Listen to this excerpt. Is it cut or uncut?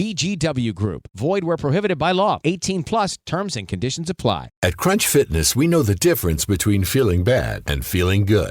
cut